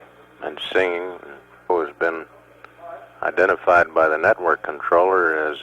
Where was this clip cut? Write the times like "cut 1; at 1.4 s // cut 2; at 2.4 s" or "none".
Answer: cut 1; at 1.7 s